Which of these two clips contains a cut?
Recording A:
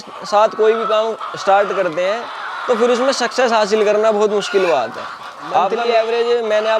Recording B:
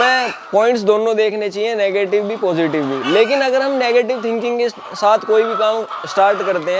A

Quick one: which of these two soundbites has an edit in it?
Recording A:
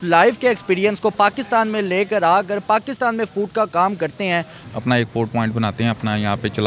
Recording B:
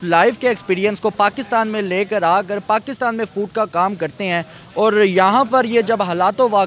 A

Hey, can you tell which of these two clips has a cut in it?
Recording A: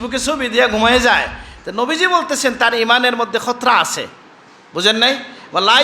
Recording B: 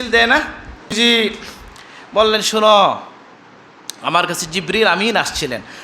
B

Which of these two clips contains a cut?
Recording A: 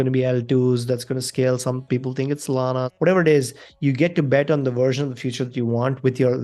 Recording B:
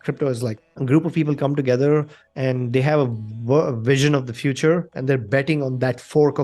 A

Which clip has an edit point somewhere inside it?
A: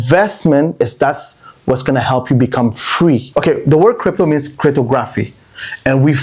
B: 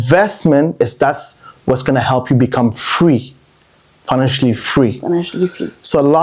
A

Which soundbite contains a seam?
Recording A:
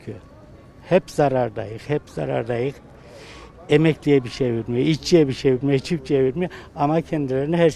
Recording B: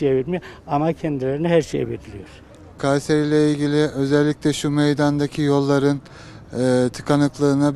B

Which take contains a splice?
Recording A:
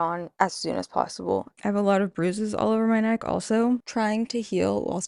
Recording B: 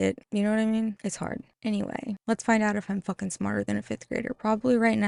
A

